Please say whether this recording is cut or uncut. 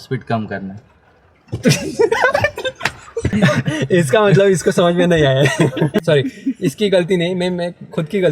cut